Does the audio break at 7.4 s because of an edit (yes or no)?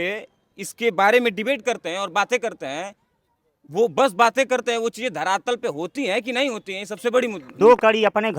yes